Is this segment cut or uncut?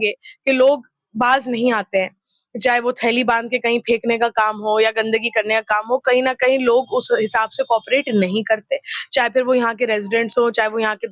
uncut